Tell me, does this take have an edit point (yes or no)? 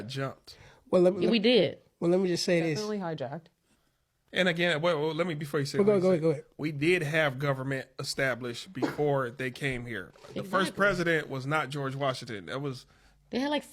no